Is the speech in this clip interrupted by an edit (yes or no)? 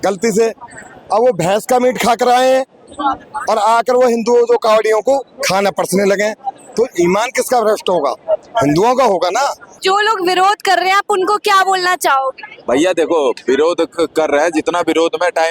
yes